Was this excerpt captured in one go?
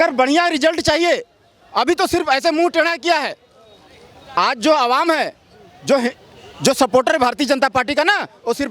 yes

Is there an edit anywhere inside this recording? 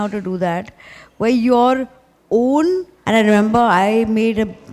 yes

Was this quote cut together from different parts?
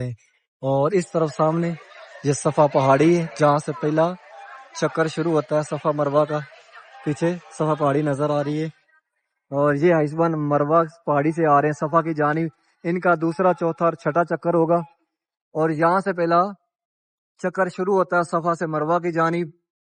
no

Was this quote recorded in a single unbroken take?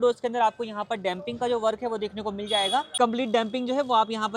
yes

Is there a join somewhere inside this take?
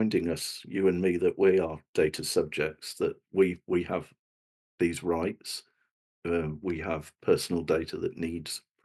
no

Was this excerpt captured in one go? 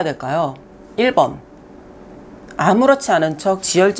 yes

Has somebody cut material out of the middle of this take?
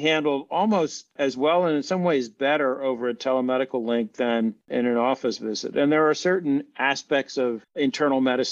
no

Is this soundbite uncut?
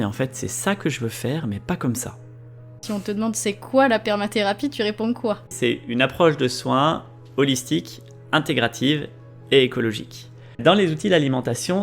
no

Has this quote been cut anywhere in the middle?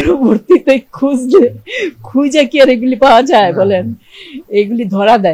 no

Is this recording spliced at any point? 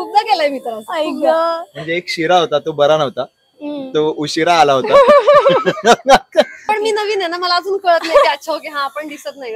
yes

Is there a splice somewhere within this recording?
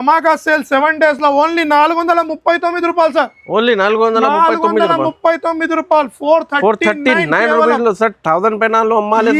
no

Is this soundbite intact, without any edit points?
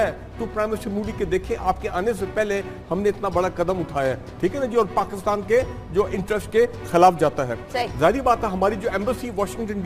yes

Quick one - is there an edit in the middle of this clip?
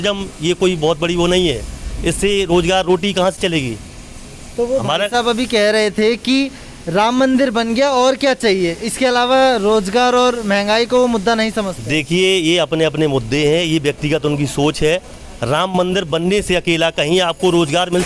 no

